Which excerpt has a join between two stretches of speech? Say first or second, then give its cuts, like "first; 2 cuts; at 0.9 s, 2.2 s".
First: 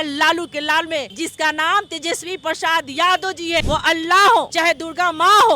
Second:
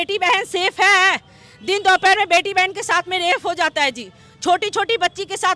first; 3 cuts; at 1.1 s, 3.6 s, 4.5 s